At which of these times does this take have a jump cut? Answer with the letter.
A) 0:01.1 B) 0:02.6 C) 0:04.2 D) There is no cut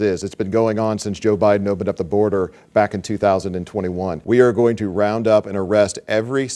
C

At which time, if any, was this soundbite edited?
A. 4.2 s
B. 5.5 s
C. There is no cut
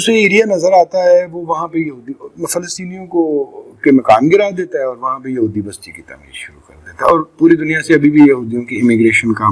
C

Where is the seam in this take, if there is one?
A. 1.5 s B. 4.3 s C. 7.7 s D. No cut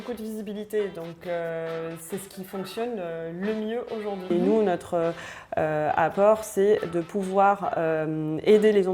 B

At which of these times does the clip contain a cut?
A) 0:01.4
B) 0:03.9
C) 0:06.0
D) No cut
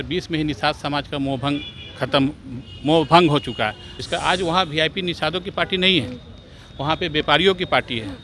B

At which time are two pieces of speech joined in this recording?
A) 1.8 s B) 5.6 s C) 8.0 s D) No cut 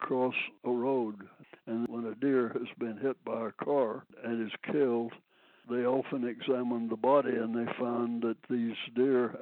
A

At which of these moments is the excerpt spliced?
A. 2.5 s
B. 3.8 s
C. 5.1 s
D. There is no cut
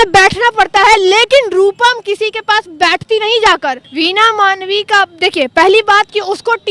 B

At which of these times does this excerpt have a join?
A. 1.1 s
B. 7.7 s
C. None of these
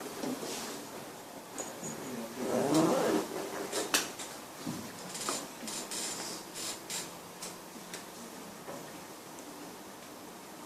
C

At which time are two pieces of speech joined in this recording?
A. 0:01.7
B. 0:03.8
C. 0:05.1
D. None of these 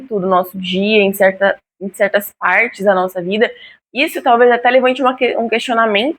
B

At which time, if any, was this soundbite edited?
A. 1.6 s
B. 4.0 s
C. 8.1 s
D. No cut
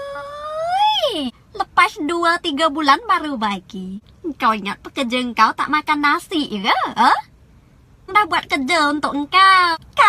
D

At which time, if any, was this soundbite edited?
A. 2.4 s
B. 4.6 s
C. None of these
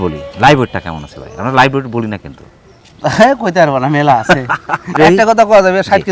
C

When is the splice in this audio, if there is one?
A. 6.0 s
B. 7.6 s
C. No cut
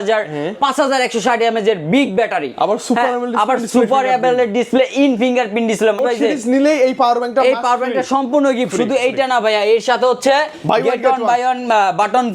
A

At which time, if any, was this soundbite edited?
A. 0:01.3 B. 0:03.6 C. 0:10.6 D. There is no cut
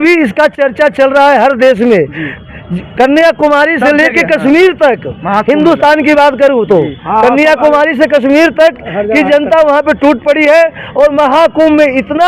D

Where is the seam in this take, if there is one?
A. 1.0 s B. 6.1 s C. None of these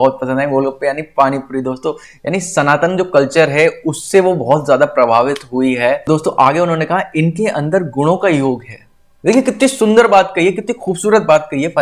B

